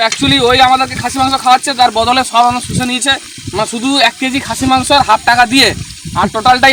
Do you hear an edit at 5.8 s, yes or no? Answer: no